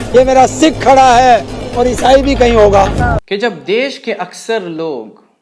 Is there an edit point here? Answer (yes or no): yes